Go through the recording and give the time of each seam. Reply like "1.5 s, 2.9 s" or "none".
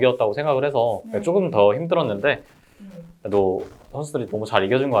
none